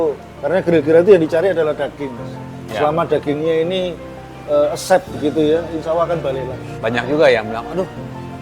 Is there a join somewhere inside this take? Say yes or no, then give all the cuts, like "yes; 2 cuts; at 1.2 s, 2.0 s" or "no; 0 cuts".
yes; 1 cut; at 6.6 s